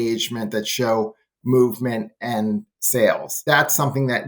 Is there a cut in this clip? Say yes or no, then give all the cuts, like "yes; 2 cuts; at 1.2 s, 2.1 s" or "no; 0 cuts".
yes; 1 cut; at 3.3 s